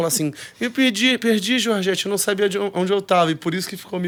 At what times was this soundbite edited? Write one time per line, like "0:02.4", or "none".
none